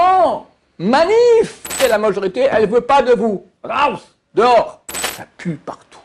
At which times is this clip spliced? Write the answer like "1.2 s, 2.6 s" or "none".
1.7 s, 5.0 s